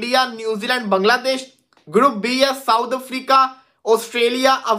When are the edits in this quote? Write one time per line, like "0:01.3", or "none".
none